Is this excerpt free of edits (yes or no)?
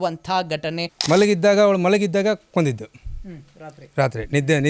no